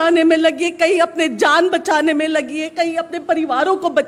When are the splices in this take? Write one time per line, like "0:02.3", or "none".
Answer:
none